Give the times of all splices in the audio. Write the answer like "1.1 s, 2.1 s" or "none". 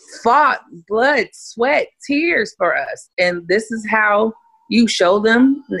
none